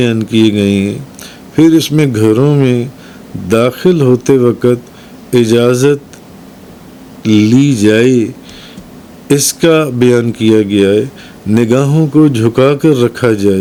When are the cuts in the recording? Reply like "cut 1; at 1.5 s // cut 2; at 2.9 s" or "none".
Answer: none